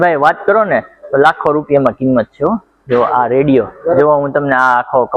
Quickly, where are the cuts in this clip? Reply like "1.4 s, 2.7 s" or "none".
4.0 s